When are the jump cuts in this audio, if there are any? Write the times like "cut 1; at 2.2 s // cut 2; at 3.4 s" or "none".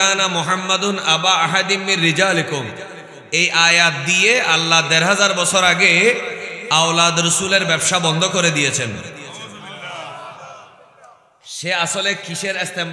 none